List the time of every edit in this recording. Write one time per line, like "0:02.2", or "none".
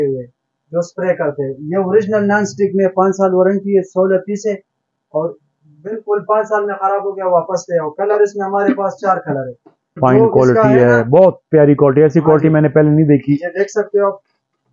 0:10.0